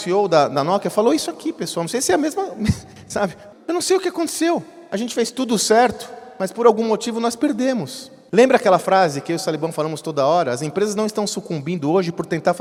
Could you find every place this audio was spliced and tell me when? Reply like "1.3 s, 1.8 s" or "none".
none